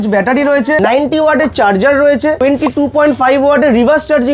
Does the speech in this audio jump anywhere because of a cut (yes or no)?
yes